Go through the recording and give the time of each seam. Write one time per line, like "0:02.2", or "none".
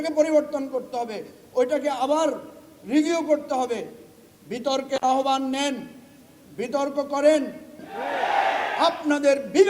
0:07.8